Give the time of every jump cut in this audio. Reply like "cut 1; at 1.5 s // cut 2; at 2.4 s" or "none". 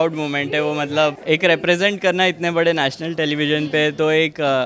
cut 1; at 1.2 s